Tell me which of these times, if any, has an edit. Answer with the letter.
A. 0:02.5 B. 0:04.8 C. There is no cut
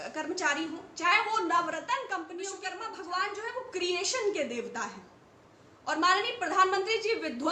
A